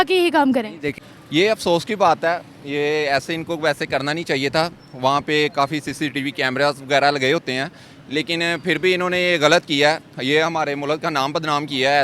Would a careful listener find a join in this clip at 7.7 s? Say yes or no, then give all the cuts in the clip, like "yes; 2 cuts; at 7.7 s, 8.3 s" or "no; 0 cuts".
no; 1 cut; at 1.0 s